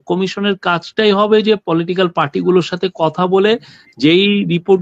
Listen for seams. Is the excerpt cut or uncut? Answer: uncut